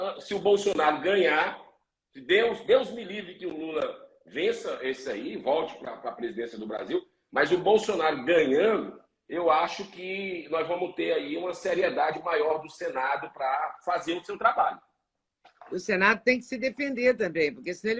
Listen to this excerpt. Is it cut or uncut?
uncut